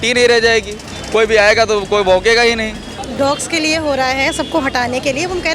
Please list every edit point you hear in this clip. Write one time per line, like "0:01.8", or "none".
0:03.0